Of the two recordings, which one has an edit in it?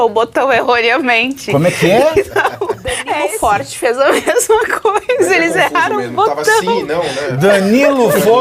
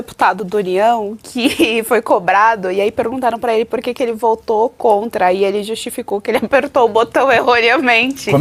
first; 1 cut; at 3.1 s

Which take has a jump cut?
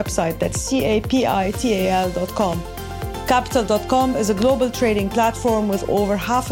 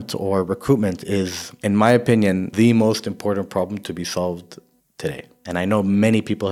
second; 3 cuts; at 1.4 s, 2.5 s, 5.0 s

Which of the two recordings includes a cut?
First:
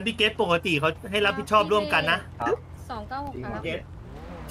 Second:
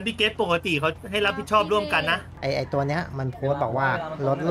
second; 1 cut; at 2.3 s

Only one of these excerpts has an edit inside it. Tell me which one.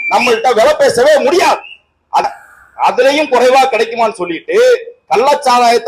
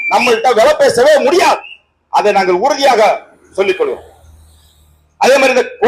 first; 1 cut; at 2.2 s

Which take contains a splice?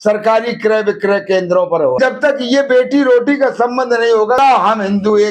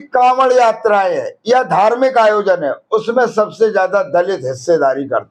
first; 2 cuts; at 2.0 s, 4.4 s

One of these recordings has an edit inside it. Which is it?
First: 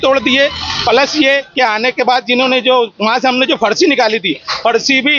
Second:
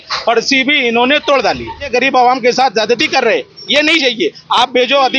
second; 1 cut; at 1.8 s

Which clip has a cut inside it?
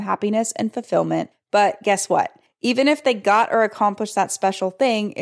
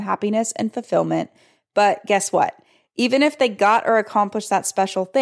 first; 2 cuts; at 1.4 s, 2.4 s

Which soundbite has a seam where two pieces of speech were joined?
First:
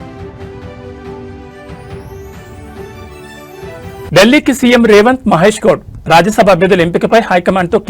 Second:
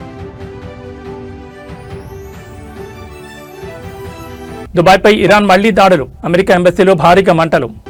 first; 1 cut; at 4.1 s

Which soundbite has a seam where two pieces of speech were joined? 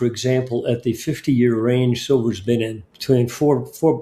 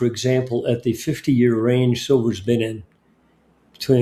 first; 1 cut; at 2.9 s

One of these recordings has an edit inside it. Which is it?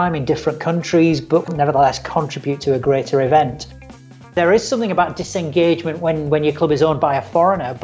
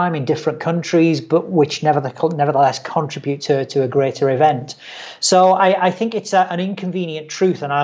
first; 3 cuts; at 1.5 s, 2.6 s, 4.2 s

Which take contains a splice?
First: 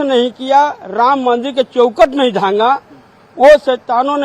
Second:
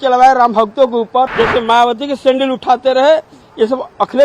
second; 1 cut; at 1.3 s

